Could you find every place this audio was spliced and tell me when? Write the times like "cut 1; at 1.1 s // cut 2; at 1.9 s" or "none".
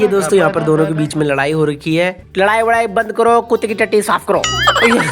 cut 1; at 2.2 s